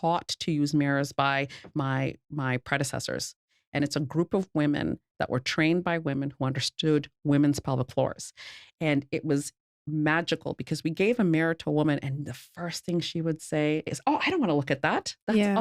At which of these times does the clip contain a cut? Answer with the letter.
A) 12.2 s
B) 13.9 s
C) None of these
B